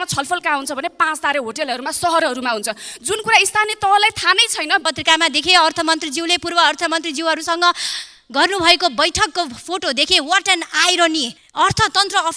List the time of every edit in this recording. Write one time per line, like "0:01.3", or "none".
0:04.8
0:11.4